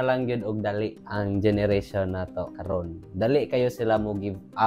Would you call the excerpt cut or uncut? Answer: uncut